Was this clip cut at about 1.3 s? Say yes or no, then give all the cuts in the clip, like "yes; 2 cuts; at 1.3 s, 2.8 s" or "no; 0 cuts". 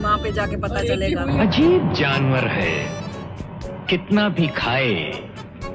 yes; 1 cut; at 1.3 s